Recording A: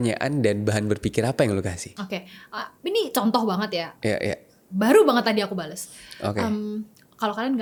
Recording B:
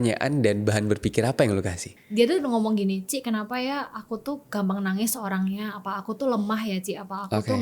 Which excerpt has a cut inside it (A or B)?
B